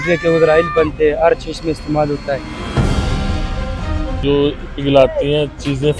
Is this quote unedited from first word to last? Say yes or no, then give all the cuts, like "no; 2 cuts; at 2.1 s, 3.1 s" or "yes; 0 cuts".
no; 2 cuts; at 2.6 s, 4.2 s